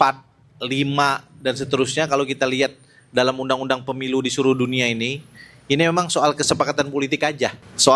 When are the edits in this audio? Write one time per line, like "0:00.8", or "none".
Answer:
none